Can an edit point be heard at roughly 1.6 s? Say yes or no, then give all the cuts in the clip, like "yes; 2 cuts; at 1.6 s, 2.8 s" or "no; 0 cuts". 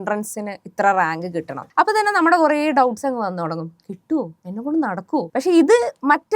yes; 2 cuts; at 1.6 s, 5.3 s